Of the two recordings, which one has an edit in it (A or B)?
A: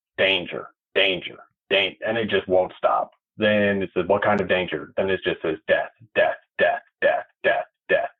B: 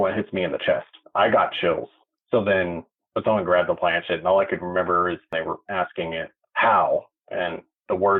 B